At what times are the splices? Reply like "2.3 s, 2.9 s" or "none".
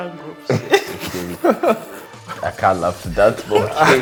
none